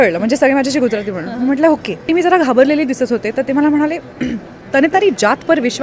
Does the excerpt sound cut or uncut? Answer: cut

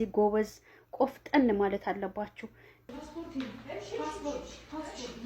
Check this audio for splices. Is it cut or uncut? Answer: cut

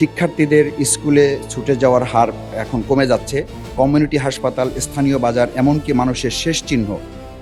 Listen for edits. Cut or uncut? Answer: uncut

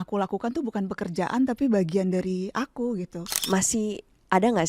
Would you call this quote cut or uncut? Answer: cut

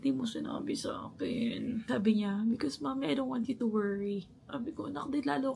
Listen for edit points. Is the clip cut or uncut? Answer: uncut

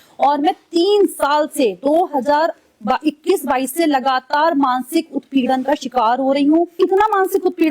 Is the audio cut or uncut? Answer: cut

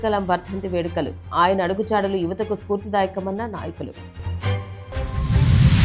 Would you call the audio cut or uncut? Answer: uncut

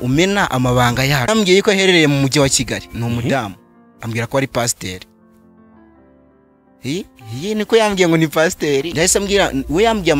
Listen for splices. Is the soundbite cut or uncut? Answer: cut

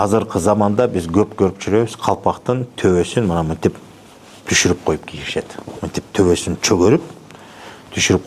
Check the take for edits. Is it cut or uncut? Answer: uncut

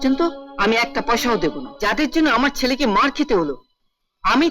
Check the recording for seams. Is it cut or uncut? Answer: cut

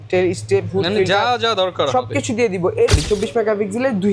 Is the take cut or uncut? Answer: cut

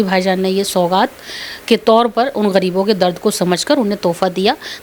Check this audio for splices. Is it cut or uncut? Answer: uncut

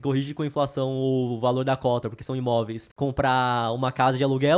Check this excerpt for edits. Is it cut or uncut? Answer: cut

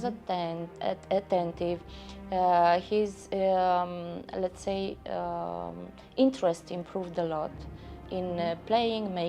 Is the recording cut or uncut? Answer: uncut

